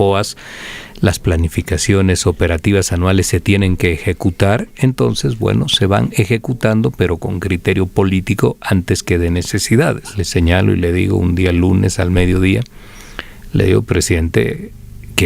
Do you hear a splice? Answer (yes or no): yes